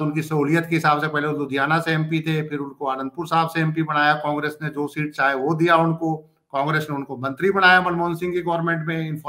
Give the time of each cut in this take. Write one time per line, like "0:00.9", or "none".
none